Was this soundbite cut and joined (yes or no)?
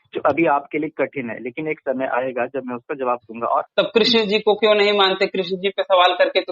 yes